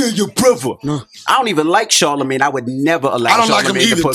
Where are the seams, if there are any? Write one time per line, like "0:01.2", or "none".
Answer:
0:01.1